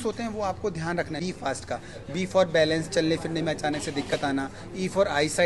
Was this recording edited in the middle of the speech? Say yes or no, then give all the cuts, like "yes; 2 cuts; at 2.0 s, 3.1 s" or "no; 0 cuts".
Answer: yes; 1 cut; at 1.2 s